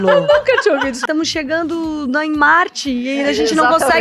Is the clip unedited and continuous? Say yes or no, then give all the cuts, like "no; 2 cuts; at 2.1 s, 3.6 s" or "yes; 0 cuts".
no; 1 cut; at 1.0 s